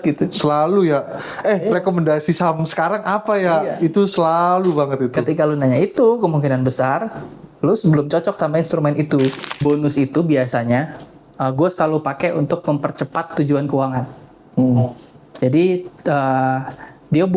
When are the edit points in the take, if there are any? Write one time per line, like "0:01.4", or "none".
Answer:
0:09.6